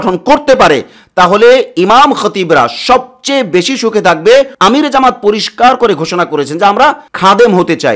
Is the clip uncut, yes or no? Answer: no